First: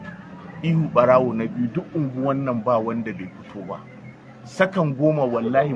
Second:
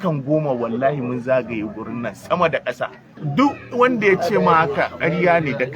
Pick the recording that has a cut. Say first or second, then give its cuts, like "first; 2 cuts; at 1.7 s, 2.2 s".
second; 1 cut; at 3.1 s